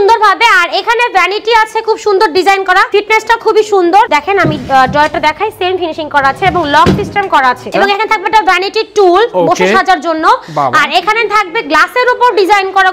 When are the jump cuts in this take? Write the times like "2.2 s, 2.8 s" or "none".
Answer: 2.9 s, 4.1 s, 7.6 s